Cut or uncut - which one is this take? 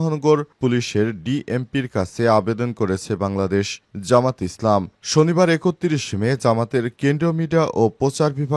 uncut